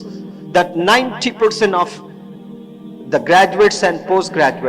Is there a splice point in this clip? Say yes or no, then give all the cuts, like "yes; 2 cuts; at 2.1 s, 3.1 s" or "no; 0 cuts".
no; 0 cuts